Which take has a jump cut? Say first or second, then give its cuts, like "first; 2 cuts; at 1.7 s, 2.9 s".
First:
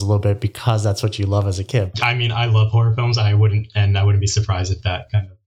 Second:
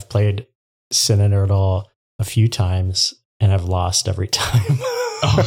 first; 1 cut; at 1.9 s